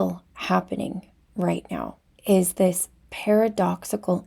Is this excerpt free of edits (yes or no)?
no